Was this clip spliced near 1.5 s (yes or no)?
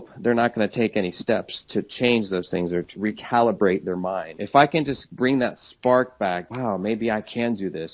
no